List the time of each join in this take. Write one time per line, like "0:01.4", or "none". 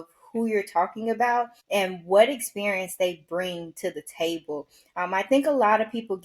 0:01.6